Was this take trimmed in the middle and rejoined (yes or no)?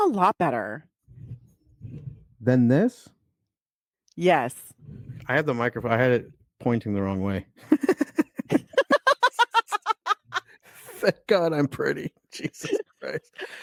no